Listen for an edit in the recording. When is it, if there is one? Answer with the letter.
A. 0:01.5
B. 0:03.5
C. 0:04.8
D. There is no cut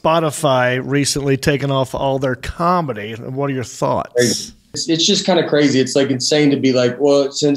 C